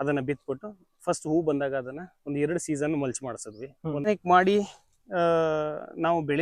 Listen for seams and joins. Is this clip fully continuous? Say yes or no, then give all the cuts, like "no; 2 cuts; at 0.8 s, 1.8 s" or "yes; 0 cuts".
no; 1 cut; at 4.1 s